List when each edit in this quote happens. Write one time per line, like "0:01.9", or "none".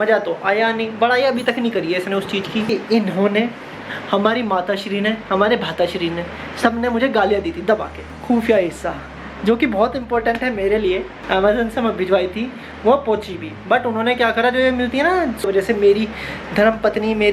0:02.7
0:08.1
0:11.1
0:15.4